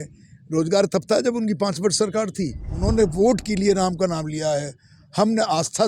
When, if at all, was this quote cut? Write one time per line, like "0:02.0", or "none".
0:02.7